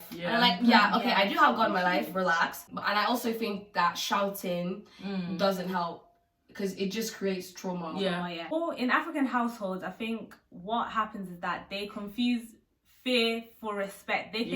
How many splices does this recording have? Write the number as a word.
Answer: two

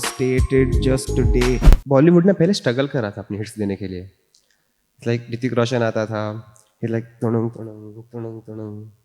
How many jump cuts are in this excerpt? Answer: one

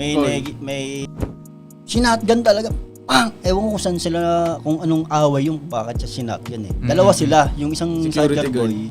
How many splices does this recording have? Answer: one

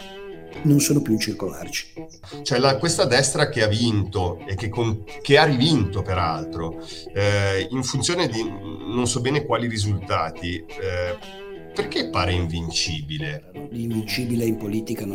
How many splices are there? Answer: two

